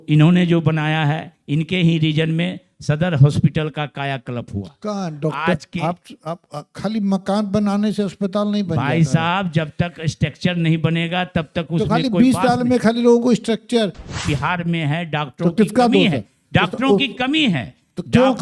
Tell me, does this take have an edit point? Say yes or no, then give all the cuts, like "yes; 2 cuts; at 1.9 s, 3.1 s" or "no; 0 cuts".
yes; 1 cut; at 14.3 s